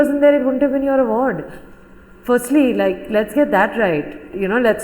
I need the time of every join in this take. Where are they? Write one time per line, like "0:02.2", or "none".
none